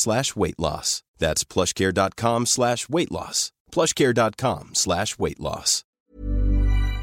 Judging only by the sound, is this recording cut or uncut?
cut